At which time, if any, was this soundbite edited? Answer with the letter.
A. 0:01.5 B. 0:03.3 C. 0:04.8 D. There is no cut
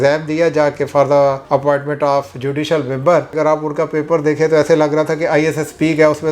B